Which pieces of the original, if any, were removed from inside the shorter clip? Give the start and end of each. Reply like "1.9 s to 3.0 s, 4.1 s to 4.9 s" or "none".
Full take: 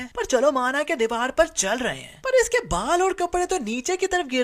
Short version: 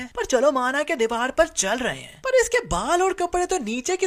none